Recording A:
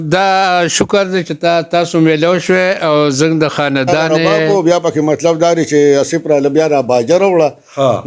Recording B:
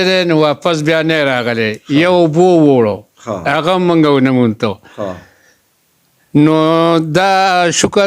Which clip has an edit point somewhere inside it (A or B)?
A